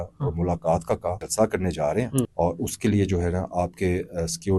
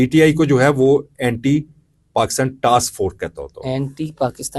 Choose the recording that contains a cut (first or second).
first